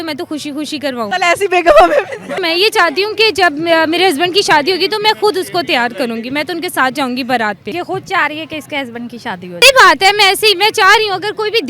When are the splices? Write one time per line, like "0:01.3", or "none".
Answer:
0:01.1
0:02.4
0:07.6
0:09.6

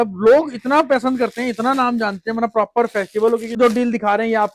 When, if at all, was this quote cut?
0:03.6

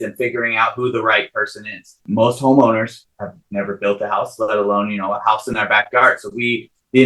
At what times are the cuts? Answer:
0:02.0

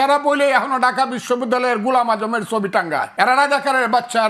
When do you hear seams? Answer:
none

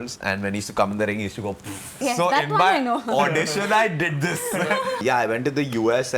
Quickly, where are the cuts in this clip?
0:01.9
0:05.0

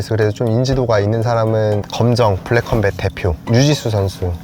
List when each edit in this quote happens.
0:01.9
0:03.4

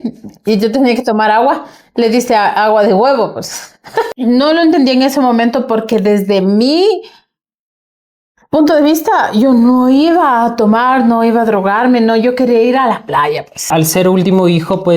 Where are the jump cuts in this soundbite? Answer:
0:04.1
0:13.7

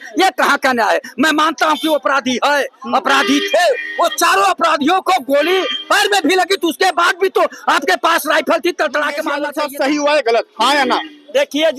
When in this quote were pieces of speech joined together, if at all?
0:09.4

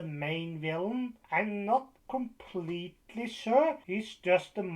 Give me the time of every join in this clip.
0:01.2
0:02.0
0:03.8

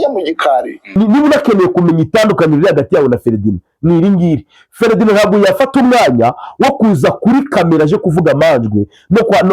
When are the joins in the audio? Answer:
0:00.9

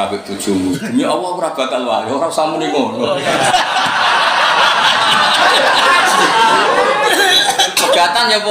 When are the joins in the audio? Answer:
none

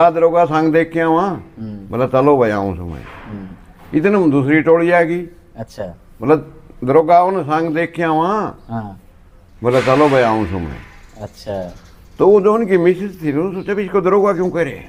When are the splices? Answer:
none

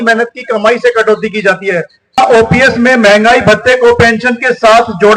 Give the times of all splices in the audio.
0:02.2

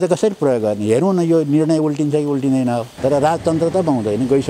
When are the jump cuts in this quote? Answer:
0:02.9

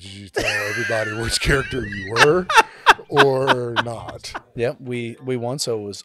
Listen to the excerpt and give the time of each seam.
0:04.5

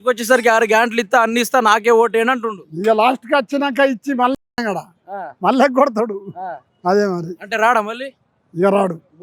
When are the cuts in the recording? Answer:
none

